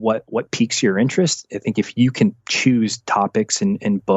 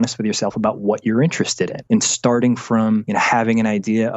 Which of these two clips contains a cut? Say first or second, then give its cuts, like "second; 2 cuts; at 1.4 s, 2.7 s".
second; 2 cuts; at 1.8 s, 3.1 s